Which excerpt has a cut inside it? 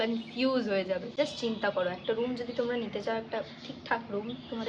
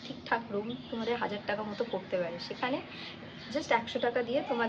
first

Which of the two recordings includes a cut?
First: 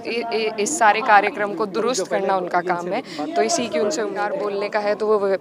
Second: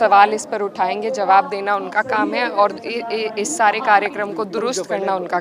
first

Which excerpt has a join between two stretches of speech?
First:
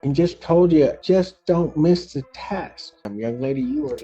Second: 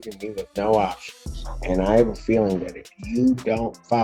first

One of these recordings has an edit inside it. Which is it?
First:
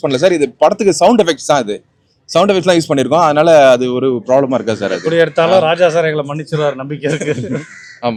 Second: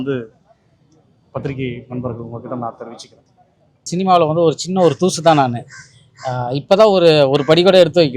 second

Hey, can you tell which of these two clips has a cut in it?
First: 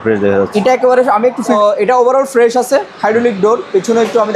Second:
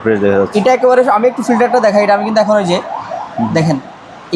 first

